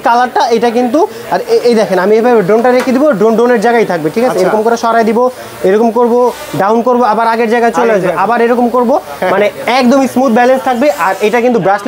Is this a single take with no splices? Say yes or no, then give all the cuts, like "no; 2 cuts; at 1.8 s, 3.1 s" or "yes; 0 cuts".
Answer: yes; 0 cuts